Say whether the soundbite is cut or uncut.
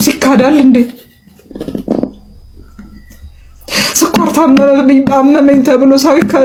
uncut